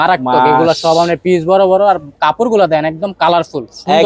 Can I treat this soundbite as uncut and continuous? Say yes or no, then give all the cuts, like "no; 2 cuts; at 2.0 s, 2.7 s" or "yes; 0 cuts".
yes; 0 cuts